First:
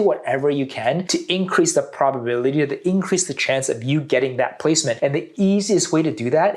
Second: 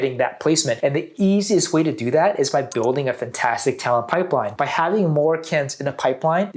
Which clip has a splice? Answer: second; 1 cut; at 4.5 s

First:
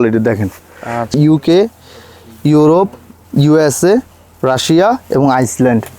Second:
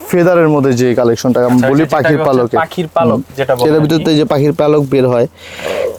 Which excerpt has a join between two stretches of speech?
first; 1 cut; at 1.2 s

